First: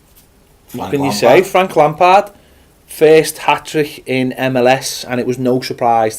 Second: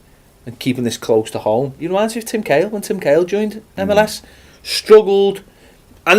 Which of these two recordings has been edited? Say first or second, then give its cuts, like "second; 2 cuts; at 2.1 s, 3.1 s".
first; 1 cut; at 3.9 s